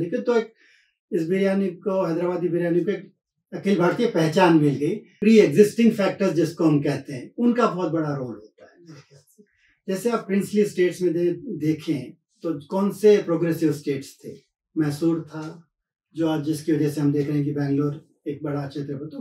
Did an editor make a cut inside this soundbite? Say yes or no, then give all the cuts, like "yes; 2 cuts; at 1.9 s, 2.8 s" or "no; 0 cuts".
yes; 1 cut; at 5.1 s